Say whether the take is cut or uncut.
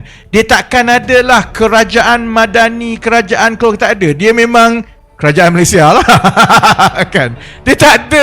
uncut